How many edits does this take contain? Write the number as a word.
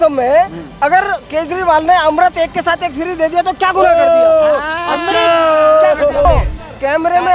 one